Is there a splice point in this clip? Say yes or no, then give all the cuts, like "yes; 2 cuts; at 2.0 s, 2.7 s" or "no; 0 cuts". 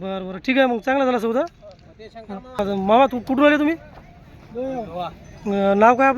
yes; 1 cut; at 2.6 s